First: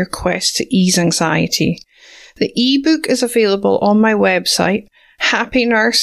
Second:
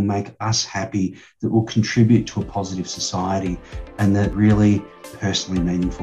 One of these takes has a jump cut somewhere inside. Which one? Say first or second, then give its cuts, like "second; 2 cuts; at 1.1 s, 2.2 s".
second; 2 cuts; at 4.3 s, 5.1 s